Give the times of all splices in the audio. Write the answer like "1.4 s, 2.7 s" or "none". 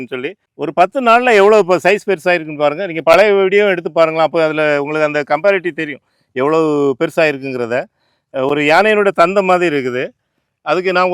none